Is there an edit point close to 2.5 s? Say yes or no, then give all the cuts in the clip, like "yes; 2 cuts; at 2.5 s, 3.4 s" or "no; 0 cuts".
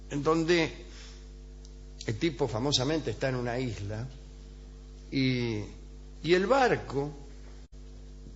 no; 1 cut; at 6.3 s